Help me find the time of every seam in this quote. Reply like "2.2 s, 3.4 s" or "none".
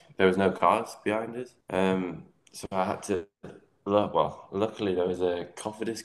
1.6 s